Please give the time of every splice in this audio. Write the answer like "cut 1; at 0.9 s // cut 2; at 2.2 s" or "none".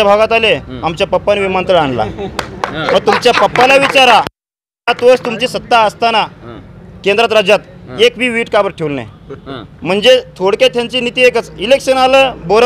none